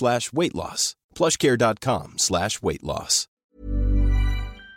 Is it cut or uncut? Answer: cut